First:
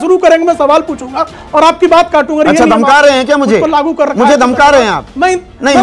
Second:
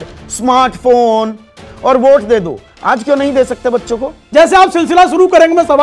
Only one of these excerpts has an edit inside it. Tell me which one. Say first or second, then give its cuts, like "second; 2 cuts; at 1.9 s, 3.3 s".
second; 2 cuts; at 1.7 s, 4.2 s